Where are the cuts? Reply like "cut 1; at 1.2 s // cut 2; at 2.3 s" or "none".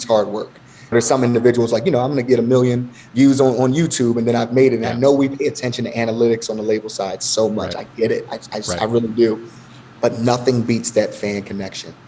cut 1; at 0.9 s